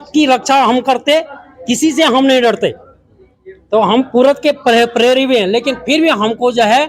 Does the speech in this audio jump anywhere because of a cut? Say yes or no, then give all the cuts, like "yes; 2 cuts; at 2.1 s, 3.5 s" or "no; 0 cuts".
no; 0 cuts